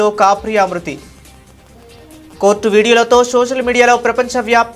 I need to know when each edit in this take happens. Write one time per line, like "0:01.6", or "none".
0:01.1
0:02.4